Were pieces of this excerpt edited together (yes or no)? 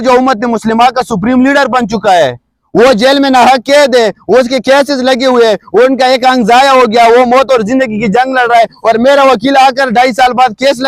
no